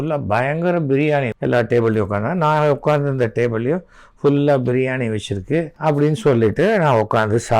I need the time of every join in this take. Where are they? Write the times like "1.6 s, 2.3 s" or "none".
1.3 s, 5.7 s